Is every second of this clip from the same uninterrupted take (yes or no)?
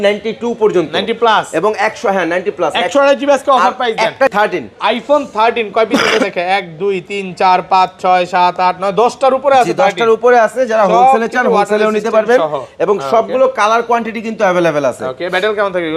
no